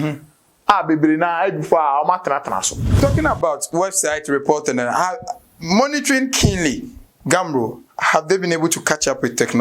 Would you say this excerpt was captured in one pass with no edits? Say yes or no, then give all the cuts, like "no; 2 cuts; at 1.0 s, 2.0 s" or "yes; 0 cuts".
no; 1 cut; at 2.9 s